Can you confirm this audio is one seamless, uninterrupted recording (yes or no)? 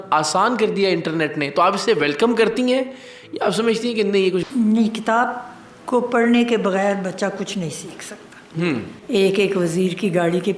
no